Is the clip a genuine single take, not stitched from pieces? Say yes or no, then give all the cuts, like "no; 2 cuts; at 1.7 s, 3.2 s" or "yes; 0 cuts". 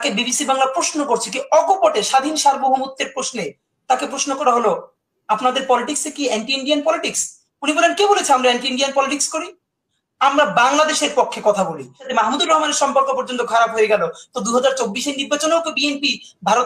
no; 1 cut; at 12.1 s